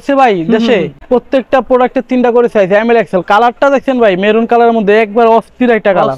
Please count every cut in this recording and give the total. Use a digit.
1